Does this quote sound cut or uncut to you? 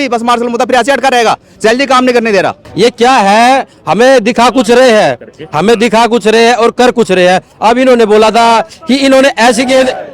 cut